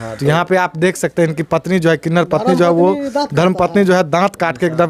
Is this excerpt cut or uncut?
uncut